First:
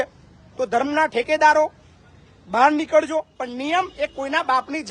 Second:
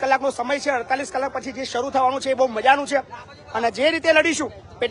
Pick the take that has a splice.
first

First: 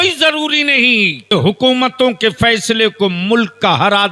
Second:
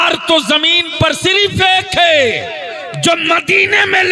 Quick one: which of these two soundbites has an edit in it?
first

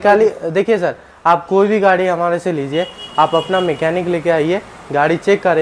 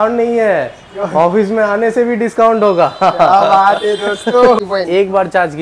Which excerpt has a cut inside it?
second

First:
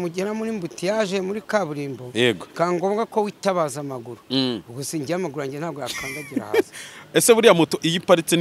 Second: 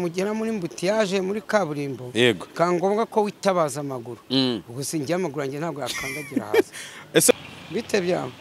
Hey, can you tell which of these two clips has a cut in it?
second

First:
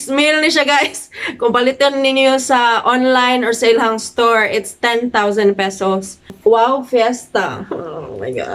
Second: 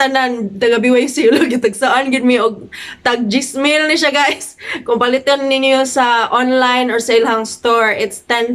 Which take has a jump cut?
first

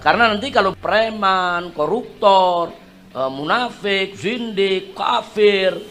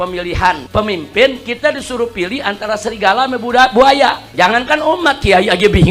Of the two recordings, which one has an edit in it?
second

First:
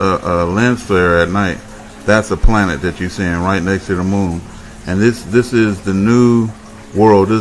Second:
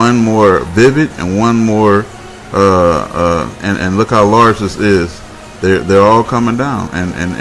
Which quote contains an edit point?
second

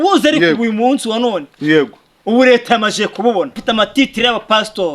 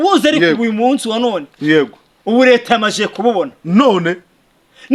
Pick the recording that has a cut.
first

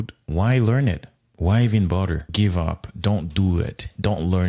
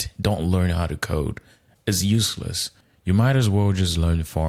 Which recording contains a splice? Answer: first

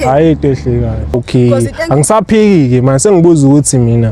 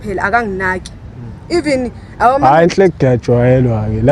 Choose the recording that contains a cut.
first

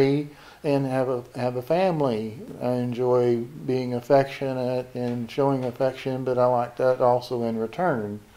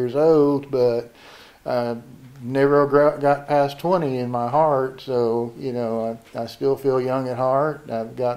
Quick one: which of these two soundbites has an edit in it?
first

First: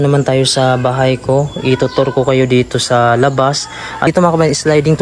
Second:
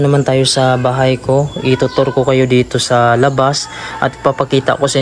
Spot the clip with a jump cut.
first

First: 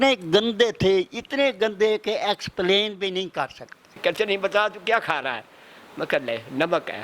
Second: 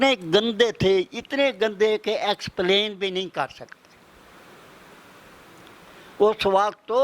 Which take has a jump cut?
first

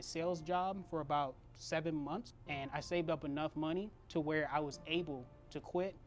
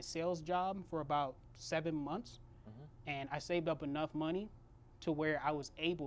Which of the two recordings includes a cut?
first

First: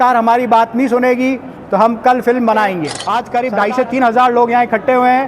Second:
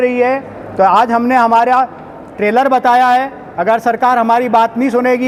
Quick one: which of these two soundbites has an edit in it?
first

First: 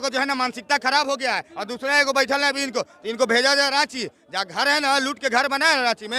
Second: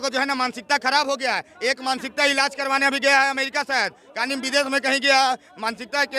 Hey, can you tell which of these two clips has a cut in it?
first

